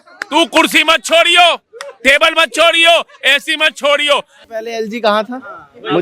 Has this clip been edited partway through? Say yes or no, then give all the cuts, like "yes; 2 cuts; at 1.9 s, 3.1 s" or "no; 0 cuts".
yes; 1 cut; at 4.3 s